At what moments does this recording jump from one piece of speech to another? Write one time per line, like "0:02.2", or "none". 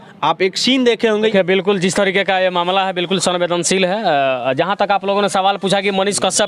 0:01.3